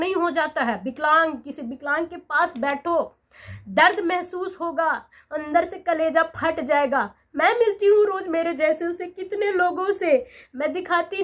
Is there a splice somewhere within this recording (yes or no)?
no